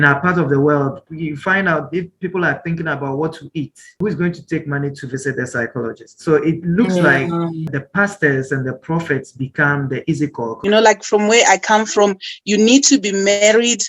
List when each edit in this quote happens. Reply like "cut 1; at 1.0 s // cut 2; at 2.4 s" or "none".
cut 1; at 1.1 s // cut 2; at 4.0 s // cut 3; at 7.6 s // cut 4; at 10.5 s

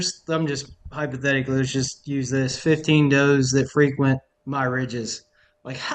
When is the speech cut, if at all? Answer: cut 1; at 4.3 s

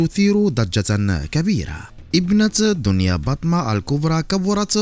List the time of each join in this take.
cut 1; at 1.9 s

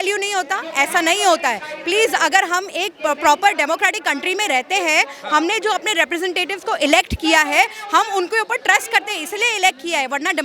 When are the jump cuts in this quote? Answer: none

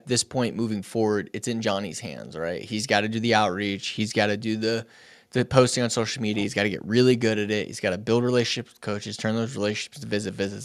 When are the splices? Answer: none

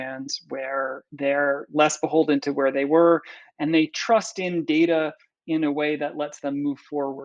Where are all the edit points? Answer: none

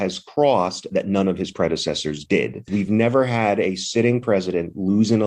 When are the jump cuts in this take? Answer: cut 1; at 2.7 s

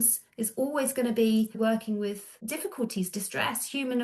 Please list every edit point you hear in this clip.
cut 1; at 1.5 s // cut 2; at 2.3 s

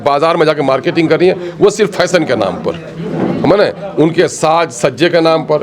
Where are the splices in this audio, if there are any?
none

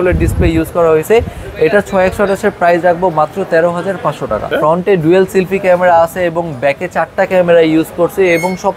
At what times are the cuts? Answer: cut 1; at 4.4 s

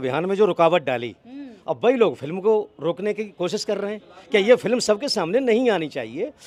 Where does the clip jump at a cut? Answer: none

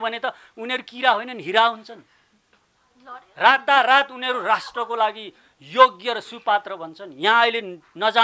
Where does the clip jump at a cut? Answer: none

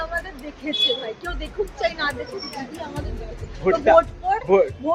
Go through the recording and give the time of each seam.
none

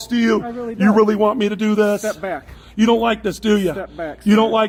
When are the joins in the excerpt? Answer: none

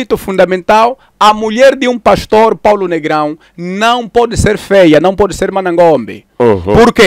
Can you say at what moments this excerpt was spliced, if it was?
none

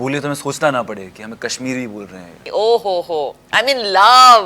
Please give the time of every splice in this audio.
cut 1; at 2.4 s

